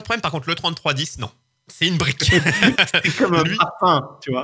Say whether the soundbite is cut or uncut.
uncut